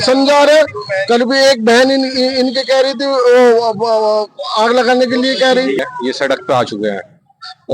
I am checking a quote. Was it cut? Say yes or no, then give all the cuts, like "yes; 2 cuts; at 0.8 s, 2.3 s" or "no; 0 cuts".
yes; 1 cut; at 5.8 s